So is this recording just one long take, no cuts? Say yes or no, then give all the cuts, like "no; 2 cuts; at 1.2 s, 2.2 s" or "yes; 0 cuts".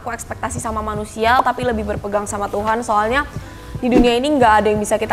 yes; 0 cuts